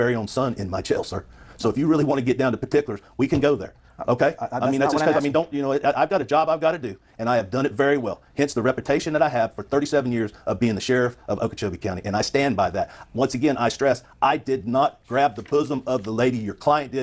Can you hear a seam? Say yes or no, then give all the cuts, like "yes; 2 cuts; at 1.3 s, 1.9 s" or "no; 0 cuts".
no; 0 cuts